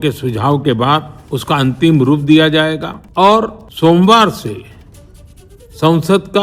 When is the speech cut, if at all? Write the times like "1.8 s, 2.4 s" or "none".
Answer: 1.2 s, 3.0 s, 3.6 s